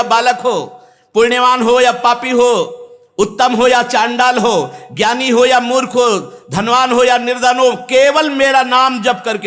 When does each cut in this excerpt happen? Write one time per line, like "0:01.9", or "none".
none